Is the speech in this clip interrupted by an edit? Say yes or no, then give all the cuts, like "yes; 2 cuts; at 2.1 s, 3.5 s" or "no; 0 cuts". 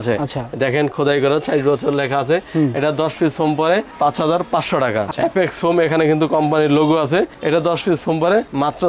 yes; 1 cut; at 5.1 s